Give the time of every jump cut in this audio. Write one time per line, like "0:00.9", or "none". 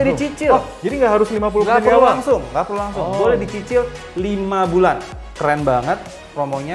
0:05.3